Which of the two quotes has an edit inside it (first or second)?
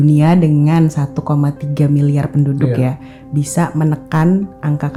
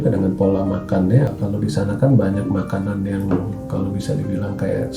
second